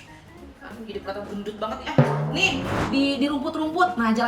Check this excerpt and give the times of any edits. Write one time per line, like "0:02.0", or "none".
0:02.8